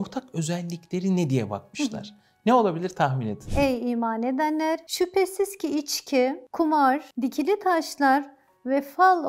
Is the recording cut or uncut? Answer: cut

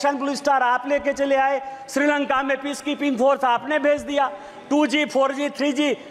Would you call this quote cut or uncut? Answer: uncut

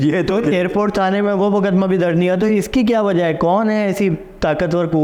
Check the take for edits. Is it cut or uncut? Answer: uncut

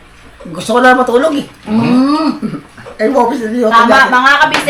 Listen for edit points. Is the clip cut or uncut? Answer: uncut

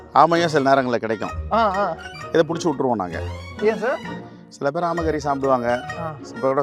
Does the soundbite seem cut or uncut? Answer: uncut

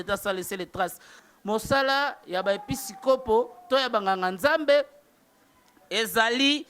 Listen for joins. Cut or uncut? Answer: cut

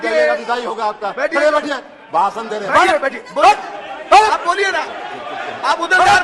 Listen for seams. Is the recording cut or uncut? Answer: uncut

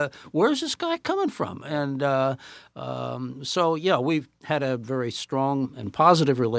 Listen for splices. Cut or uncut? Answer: uncut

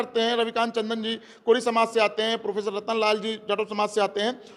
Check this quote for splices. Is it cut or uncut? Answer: uncut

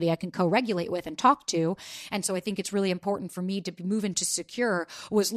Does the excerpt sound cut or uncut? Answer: uncut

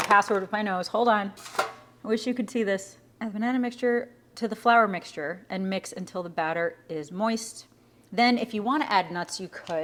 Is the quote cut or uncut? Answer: uncut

